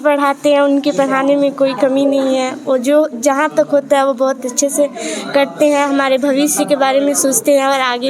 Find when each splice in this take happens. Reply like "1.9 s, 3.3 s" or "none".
none